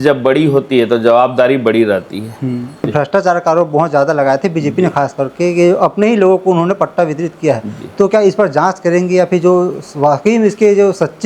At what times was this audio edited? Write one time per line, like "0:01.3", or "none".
0:02.9